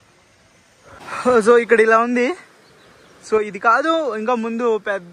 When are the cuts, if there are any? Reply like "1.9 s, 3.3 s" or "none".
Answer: 1.0 s